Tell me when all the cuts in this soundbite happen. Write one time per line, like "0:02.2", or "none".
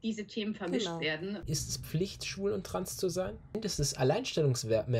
0:01.4
0:03.6